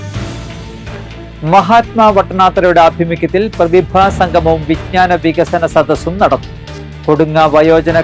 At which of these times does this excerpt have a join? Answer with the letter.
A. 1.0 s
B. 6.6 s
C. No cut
A